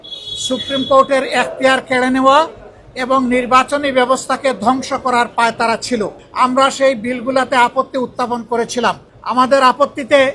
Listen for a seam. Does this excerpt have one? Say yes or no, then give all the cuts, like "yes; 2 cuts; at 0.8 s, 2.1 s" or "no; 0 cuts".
no; 0 cuts